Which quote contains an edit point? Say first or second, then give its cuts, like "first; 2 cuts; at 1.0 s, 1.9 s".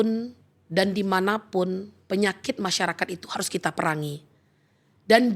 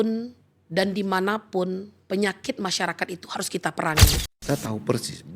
second; 1 cut; at 4.3 s